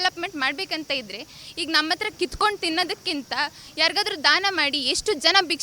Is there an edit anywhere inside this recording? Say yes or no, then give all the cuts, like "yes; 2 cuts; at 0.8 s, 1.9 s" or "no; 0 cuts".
no; 0 cuts